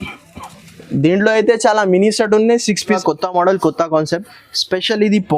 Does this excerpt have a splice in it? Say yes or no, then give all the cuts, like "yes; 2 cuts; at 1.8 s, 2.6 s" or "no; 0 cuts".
yes; 1 cut; at 3.0 s